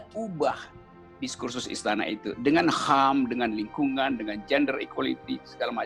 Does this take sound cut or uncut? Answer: uncut